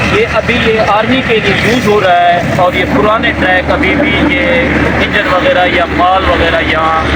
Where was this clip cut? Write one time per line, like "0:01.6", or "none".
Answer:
none